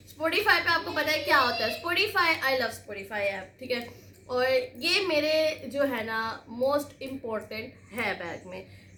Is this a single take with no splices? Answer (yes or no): yes